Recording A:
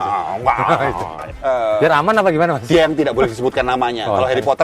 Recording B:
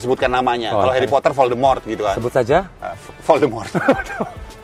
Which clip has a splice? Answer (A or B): A